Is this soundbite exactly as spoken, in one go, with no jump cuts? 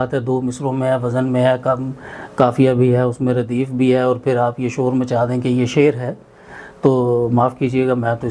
yes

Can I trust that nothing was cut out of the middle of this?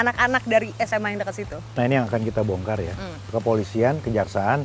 yes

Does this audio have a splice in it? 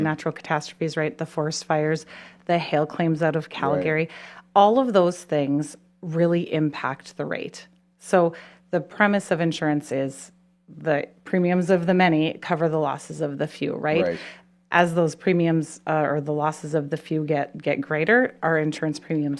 no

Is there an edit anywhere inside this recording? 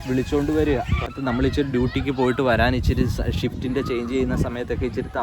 yes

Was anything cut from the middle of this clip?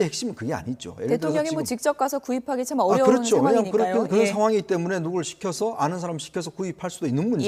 no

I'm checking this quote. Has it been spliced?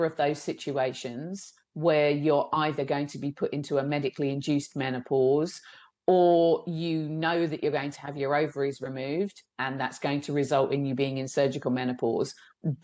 no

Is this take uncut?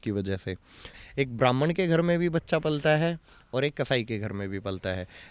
no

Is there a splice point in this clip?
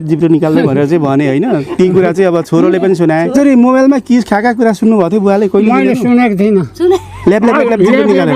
yes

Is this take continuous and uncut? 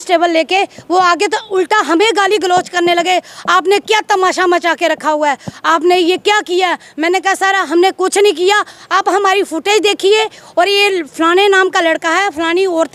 yes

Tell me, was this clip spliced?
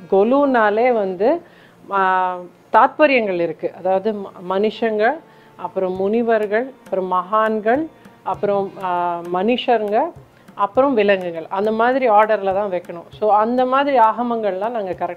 no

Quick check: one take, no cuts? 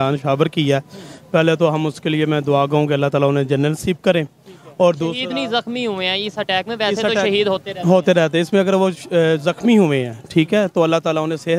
yes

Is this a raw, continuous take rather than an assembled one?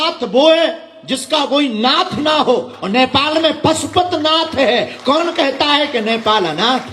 yes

